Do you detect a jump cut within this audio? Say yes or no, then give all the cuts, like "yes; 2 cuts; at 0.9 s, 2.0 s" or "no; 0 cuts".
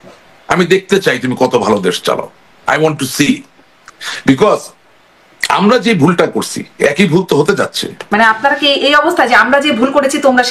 yes; 1 cut; at 8.0 s